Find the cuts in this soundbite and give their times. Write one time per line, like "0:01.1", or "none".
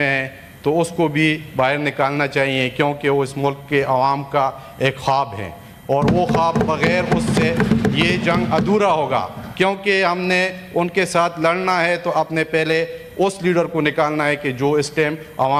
none